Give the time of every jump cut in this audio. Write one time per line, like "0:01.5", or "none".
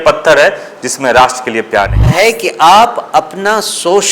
0:02.1